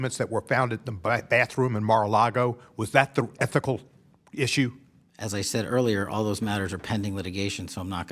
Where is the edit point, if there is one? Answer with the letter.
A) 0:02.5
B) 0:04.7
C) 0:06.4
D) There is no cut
D